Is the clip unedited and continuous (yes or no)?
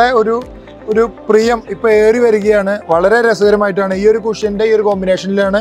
yes